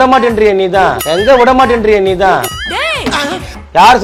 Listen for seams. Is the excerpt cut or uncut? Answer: uncut